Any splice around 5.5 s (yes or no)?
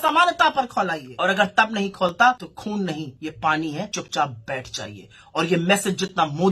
no